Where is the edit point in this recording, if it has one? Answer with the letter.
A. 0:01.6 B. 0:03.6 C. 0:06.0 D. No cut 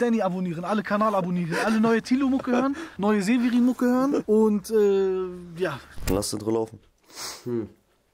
C